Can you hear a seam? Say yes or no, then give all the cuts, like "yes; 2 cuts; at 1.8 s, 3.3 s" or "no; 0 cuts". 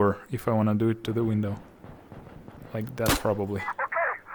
no; 0 cuts